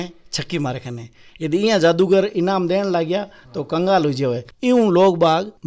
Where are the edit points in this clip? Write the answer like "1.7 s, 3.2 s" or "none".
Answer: 4.5 s